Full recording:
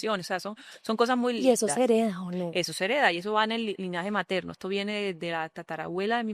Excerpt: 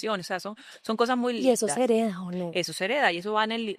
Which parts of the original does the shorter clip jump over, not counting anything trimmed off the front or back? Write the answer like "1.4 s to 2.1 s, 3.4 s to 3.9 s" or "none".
none